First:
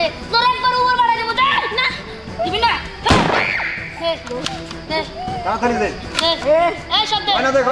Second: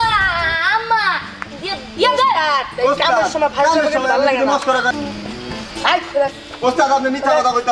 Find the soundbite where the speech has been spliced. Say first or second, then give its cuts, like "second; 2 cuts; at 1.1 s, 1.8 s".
second; 1 cut; at 4.9 s